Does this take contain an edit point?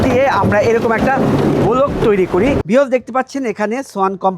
yes; 1 cut; at 2.6 s

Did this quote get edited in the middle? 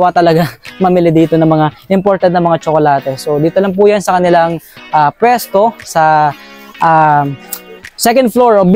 no; 0 cuts

